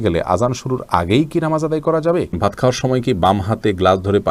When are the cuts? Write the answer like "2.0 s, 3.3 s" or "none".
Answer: 2.4 s